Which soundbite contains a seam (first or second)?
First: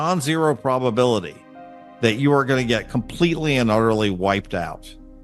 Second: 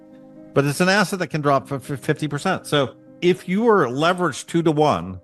second